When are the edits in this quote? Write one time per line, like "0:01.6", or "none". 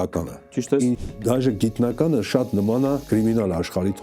0:01.0
0:03.0